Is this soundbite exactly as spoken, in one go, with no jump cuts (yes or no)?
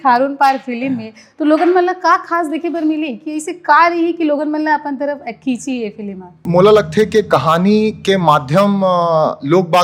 yes